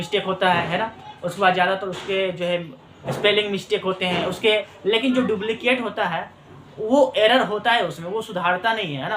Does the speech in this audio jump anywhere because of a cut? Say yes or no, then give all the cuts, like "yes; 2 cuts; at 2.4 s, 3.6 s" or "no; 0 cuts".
yes; 1 cut; at 4.7 s